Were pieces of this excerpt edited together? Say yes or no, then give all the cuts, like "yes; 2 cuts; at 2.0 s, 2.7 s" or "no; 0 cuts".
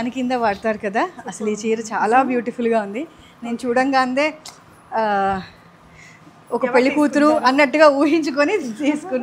no; 0 cuts